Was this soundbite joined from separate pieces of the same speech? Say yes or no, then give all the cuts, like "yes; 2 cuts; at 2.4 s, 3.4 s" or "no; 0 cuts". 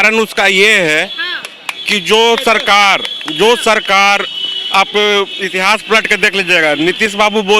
no; 0 cuts